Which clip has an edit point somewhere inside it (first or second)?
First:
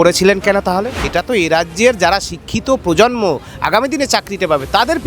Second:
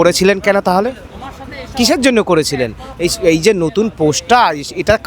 first